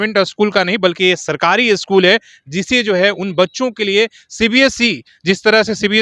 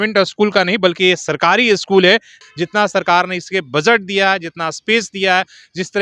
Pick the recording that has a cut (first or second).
second